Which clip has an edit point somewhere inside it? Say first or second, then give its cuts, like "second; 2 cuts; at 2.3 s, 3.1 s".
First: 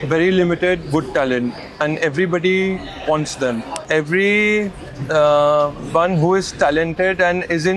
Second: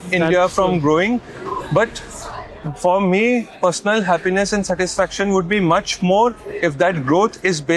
first; 1 cut; at 3.8 s